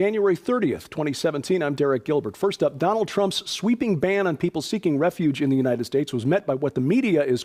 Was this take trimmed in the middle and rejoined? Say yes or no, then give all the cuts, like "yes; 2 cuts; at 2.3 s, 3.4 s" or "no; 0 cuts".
yes; 1 cut; at 4.6 s